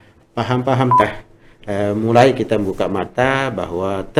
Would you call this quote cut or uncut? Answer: cut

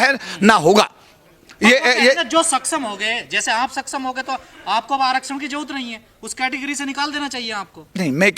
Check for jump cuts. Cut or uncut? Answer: uncut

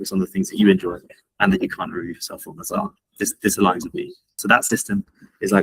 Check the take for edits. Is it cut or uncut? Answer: cut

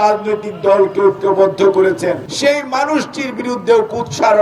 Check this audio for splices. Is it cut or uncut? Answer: cut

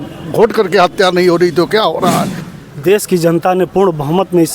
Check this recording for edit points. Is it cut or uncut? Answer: cut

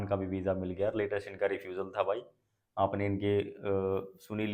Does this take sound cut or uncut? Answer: uncut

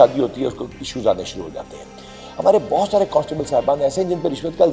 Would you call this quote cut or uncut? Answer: uncut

